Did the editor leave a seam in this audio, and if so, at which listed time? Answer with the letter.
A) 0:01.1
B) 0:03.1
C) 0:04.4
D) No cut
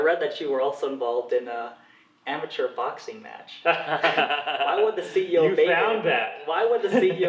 D